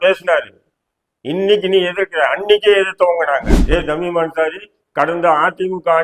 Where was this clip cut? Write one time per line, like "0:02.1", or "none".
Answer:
0:03.5